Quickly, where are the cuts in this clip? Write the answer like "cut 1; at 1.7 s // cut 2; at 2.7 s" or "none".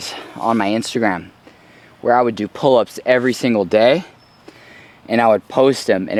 none